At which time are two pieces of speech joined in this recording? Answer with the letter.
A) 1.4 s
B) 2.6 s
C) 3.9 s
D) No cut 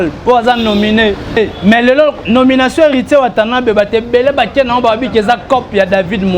A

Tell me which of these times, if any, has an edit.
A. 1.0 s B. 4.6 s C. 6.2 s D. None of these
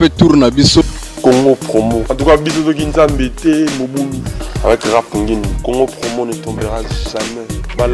A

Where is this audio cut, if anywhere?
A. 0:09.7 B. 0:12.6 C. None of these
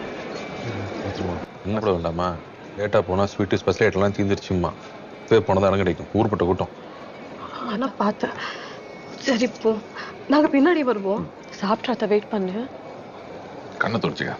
A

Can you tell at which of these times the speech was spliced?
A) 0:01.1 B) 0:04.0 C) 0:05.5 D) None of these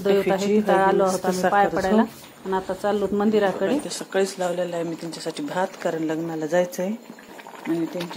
B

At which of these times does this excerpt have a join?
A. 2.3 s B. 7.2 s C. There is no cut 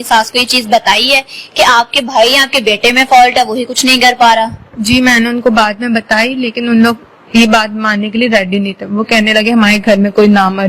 C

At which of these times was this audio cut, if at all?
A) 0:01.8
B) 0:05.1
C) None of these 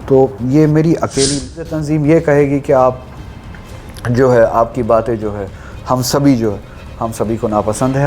A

